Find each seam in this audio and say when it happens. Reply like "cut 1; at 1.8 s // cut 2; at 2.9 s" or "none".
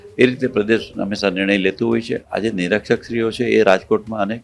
cut 1; at 2.2 s